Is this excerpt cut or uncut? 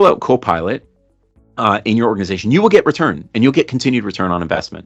uncut